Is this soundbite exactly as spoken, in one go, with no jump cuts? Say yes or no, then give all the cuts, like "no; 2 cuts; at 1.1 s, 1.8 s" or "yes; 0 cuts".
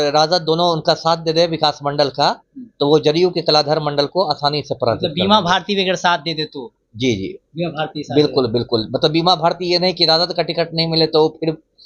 yes; 0 cuts